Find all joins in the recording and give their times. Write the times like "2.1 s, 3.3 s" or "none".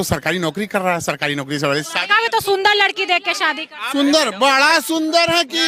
none